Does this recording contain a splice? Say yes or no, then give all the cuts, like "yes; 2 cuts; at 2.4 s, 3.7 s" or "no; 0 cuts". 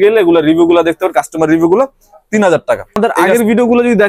yes; 1 cut; at 3.0 s